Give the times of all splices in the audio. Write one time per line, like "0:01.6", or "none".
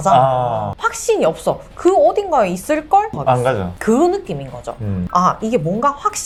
none